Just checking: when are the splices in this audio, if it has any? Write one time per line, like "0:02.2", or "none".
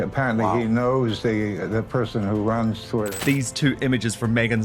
0:03.1